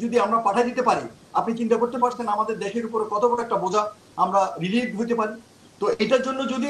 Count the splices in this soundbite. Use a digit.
0